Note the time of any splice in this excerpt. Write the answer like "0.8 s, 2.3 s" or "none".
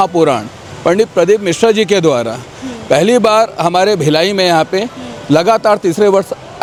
none